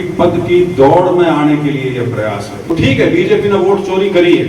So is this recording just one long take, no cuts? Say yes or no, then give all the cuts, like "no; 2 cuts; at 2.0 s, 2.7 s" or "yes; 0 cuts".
no; 1 cut; at 2.7 s